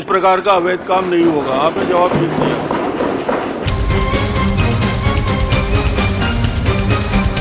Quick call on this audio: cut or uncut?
uncut